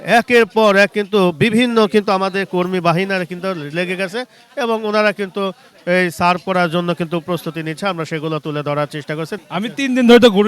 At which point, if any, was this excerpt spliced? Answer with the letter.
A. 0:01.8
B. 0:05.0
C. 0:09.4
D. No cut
C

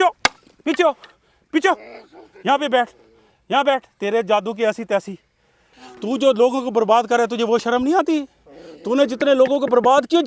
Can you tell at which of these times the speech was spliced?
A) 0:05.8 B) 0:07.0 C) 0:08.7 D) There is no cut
A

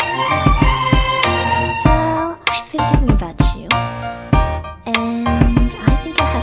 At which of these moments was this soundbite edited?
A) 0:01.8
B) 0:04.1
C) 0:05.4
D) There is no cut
A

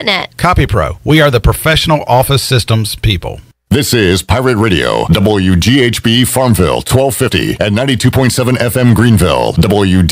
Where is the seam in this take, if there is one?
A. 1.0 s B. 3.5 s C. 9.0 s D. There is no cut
B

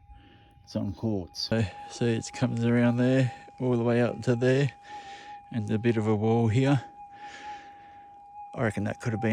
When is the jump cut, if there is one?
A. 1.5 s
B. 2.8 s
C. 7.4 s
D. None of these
A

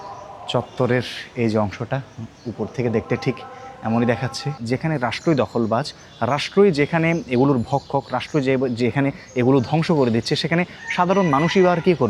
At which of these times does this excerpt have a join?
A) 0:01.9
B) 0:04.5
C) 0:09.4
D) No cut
B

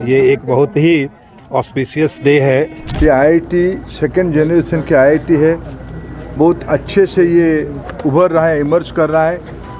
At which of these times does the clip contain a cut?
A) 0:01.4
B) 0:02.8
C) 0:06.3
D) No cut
B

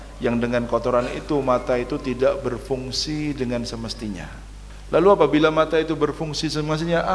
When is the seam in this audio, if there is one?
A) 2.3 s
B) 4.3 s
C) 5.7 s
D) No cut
B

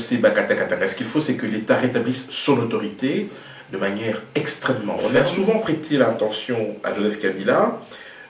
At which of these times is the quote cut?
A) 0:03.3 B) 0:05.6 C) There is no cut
B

